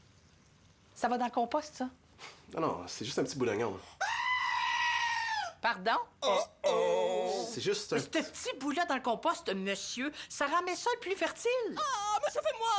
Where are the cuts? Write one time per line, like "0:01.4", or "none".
none